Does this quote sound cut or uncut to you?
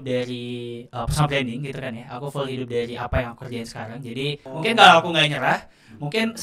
cut